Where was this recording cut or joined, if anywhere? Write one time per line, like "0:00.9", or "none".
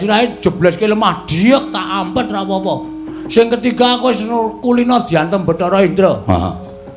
none